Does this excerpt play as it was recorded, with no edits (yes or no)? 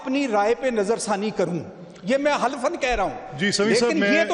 yes